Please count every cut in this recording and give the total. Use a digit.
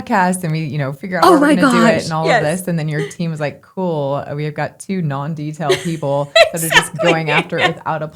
0